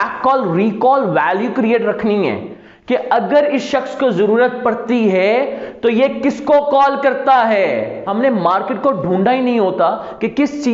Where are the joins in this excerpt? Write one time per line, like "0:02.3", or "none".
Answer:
0:08.0